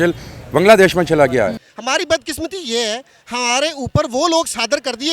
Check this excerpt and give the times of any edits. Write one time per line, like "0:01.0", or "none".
0:01.6